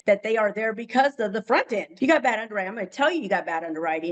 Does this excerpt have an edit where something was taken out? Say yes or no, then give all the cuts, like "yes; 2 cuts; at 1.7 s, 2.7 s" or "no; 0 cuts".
yes; 1 cut; at 2.0 s